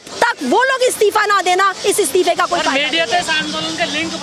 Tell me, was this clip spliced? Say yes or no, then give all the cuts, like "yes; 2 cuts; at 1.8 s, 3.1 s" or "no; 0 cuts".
no; 0 cuts